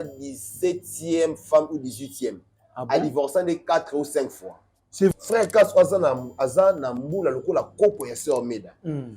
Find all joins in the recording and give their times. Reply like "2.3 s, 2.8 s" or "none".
5.1 s